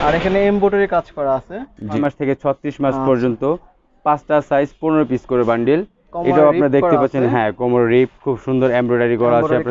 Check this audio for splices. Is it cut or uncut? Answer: cut